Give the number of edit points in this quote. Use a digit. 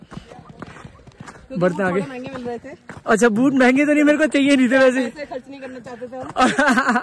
0